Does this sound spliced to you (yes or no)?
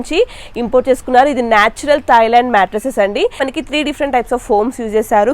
yes